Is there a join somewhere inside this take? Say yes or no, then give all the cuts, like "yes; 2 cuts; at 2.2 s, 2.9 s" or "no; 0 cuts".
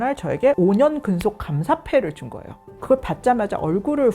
yes; 1 cut; at 2.7 s